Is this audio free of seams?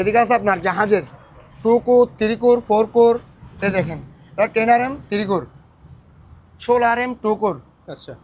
yes; 0 cuts

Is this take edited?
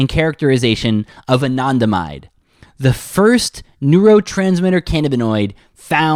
no; 0 cuts

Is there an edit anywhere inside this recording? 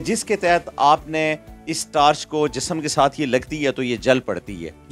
no; 0 cuts

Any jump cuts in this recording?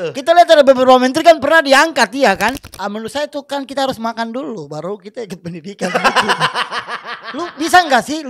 yes; 1 cut; at 2.7 s

